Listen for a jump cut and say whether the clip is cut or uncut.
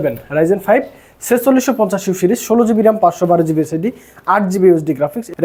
uncut